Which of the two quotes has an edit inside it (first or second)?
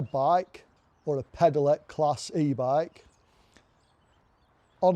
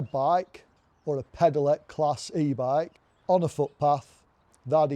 second